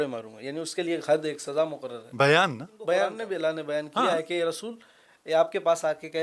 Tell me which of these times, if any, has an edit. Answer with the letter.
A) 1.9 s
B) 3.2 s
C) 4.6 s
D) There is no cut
B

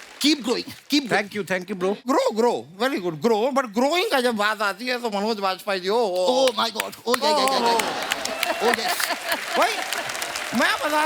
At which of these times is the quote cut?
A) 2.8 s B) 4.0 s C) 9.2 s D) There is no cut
D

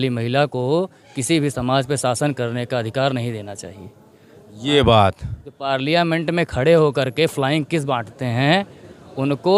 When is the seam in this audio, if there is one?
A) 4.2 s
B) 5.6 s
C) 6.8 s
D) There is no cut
D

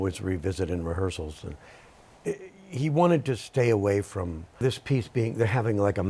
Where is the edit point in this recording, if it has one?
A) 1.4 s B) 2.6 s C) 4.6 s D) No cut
C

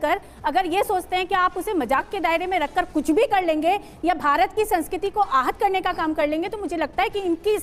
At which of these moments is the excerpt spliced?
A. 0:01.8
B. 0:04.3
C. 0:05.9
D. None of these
D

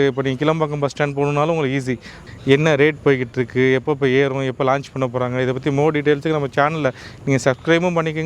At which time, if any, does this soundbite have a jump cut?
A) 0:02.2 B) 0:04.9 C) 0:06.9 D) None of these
A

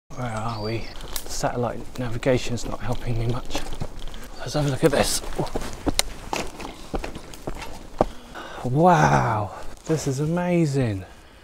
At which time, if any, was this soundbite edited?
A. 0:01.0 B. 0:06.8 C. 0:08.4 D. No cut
A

